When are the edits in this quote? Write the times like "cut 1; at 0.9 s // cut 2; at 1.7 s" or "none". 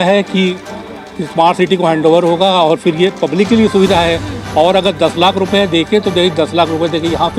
none